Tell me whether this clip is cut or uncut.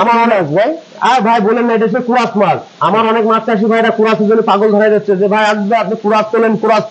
uncut